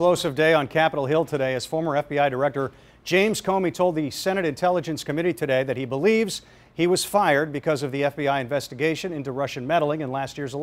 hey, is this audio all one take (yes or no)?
yes